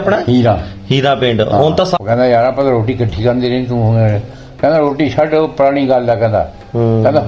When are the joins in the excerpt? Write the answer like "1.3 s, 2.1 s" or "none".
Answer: 2.0 s